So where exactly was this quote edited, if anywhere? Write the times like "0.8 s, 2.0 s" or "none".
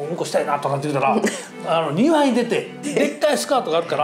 2.9 s